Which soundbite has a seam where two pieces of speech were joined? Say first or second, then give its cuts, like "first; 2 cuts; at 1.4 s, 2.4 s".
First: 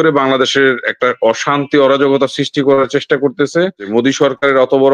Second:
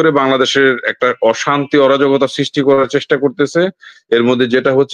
first; 1 cut; at 3.8 s